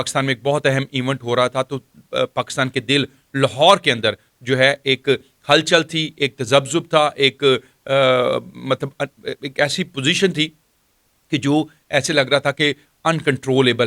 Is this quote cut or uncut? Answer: uncut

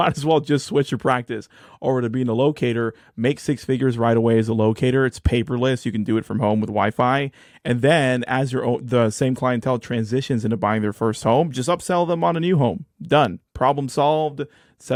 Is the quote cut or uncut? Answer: uncut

